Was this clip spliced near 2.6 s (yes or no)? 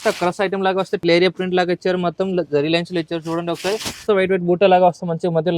no